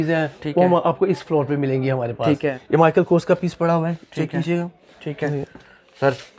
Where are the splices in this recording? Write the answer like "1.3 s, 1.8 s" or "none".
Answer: 2.6 s